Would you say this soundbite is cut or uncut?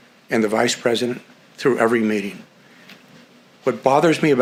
uncut